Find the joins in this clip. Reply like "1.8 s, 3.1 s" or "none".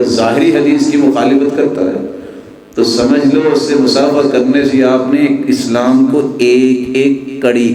none